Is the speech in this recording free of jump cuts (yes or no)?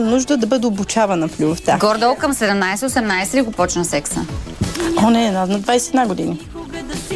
no